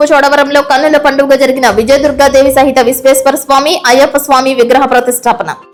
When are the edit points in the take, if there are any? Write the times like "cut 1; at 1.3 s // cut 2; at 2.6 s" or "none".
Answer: none

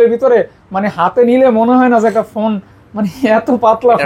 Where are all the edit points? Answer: none

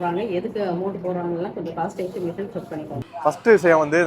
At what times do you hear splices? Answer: cut 1; at 3.0 s

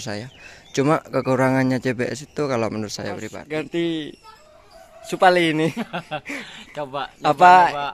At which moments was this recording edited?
cut 1; at 3.3 s

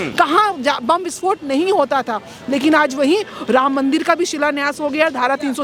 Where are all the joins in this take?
none

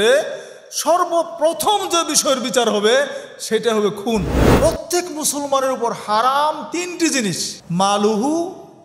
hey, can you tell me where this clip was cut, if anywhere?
cut 1; at 4.4 s // cut 2; at 7.5 s

